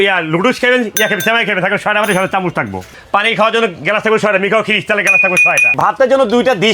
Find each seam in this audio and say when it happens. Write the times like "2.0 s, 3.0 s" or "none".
2.8 s, 5.7 s